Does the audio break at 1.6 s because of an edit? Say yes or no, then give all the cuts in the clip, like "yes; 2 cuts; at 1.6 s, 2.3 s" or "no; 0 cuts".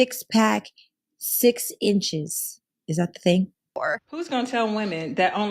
no; 1 cut; at 3.8 s